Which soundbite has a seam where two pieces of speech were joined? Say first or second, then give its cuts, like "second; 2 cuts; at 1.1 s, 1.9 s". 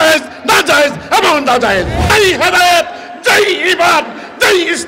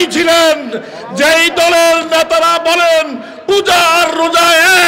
first; 1 cut; at 2.0 s